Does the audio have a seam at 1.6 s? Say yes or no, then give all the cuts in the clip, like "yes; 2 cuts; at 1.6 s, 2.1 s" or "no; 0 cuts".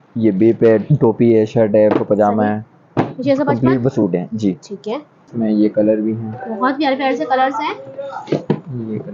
no; 1 cut; at 5.2 s